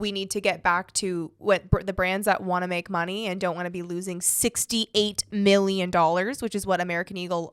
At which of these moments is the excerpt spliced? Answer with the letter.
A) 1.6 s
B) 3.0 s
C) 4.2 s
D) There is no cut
D